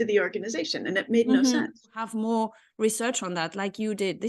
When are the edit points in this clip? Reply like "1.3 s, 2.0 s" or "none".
2.1 s

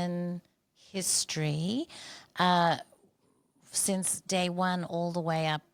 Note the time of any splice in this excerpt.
none

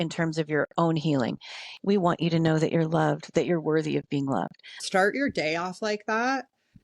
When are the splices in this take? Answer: 1.7 s, 4.7 s

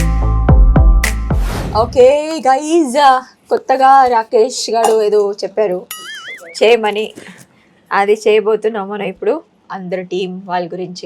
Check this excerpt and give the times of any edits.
1.4 s, 9.5 s

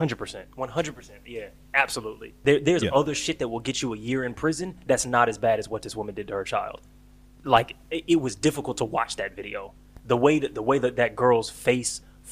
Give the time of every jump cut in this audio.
2.4 s

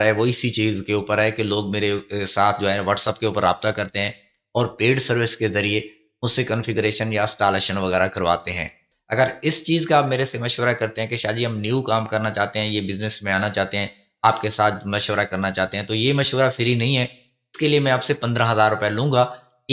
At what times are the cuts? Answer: 9.0 s

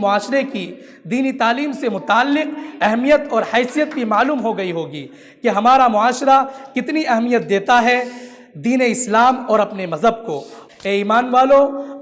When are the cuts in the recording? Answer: 10.6 s

